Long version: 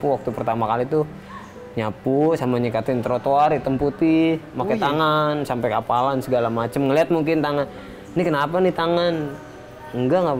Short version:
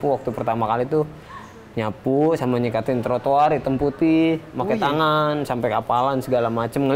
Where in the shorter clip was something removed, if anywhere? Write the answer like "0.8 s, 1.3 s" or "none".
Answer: none